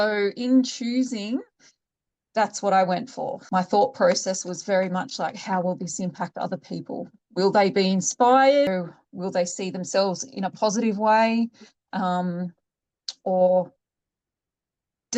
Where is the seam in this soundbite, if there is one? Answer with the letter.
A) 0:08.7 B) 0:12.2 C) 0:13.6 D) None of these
A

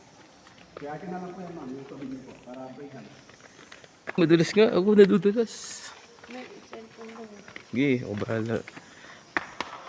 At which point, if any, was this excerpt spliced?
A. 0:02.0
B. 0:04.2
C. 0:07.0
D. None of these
B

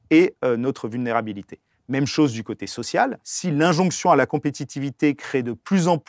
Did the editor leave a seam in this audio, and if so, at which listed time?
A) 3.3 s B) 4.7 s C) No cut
A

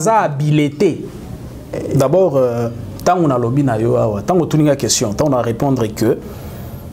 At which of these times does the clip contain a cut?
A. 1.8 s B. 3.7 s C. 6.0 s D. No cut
A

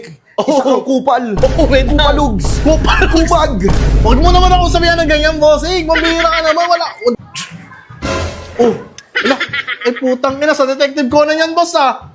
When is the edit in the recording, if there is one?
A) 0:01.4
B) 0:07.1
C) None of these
B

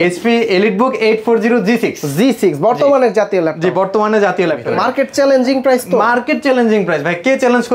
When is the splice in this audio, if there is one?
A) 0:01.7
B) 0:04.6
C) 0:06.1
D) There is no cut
B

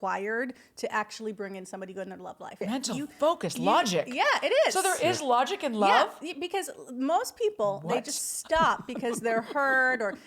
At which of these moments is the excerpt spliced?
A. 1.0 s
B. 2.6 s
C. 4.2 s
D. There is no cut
B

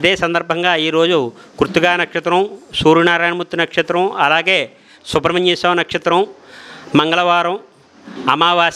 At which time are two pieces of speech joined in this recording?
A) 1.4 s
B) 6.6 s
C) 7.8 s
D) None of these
D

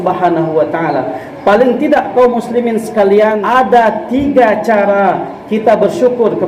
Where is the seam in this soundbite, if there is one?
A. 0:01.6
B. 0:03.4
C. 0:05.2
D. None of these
B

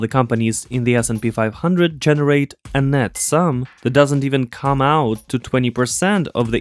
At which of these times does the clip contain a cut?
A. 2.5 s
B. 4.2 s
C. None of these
C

